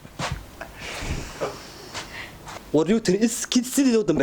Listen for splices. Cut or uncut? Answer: cut